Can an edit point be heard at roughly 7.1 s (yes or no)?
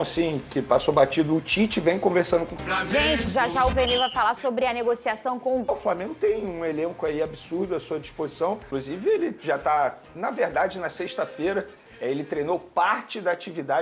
no